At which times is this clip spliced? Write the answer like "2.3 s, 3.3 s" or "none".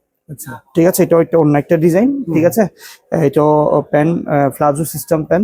none